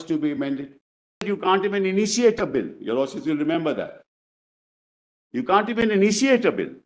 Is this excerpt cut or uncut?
cut